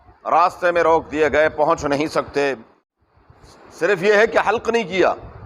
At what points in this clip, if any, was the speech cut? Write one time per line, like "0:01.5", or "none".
0:02.9